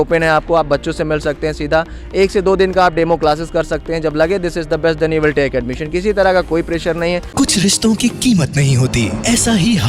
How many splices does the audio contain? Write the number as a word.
one